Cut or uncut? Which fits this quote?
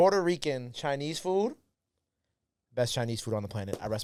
uncut